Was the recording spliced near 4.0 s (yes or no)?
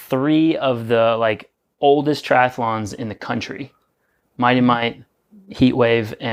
no